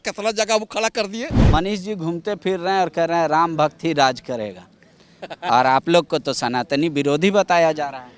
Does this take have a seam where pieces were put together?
yes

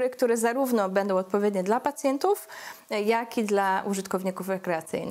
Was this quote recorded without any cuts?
yes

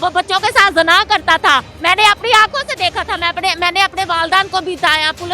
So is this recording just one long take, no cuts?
no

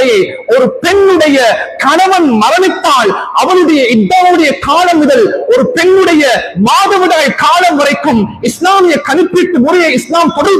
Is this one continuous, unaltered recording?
yes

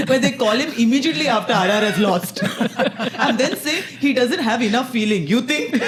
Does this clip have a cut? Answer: no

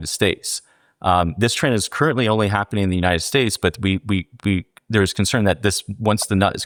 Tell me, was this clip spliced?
no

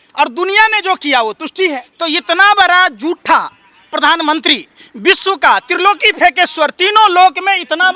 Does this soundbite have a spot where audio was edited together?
yes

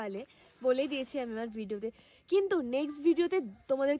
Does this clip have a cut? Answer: no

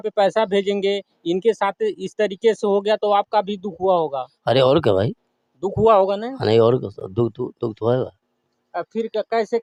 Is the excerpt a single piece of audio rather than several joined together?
yes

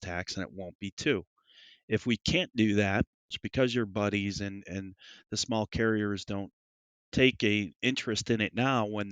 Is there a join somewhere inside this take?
yes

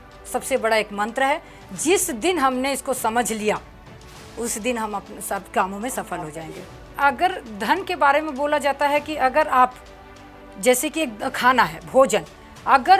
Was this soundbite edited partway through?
yes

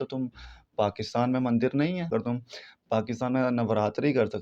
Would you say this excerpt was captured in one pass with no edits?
no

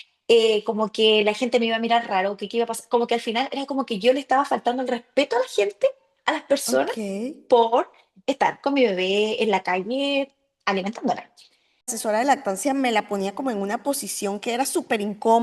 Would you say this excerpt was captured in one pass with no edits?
no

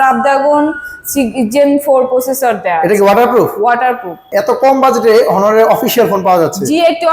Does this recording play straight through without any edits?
no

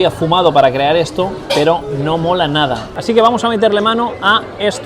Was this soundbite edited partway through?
yes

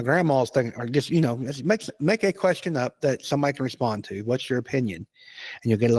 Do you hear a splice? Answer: no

